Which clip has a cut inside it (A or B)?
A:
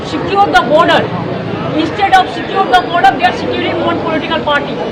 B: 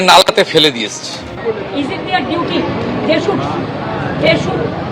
B